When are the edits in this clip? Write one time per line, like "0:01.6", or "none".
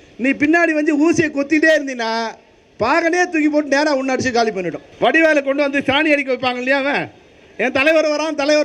0:04.8